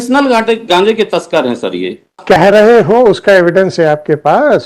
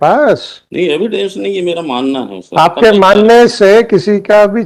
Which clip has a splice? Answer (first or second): first